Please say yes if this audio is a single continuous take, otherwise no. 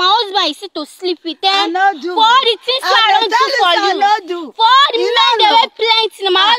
yes